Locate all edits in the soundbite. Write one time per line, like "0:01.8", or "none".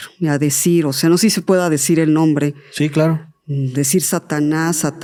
none

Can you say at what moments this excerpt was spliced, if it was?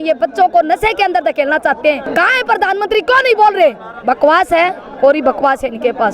0:02.1

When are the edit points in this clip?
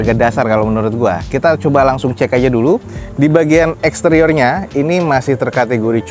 none

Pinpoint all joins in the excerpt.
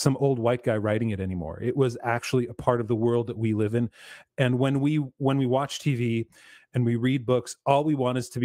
none

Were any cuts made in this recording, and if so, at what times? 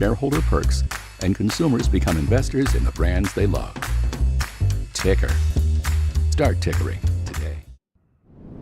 0:07.6

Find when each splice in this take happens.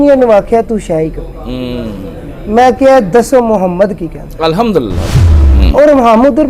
0:05.1

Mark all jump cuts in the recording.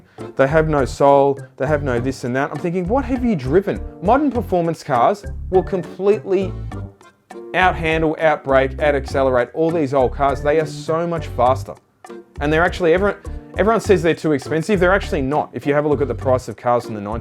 0:01.5

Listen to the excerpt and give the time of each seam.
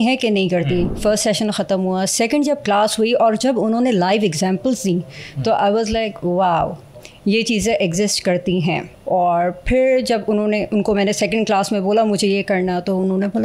0:00.9
0:08.9

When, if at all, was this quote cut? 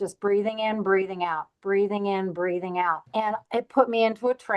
0:03.0

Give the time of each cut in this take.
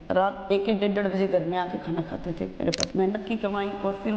0:02.8

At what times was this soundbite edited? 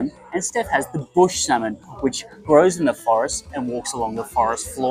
none

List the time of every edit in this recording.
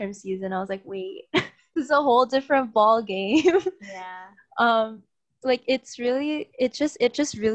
none

